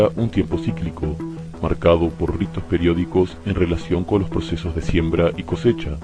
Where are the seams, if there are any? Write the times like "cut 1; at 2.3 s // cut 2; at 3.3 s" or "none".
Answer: cut 1; at 3.4 s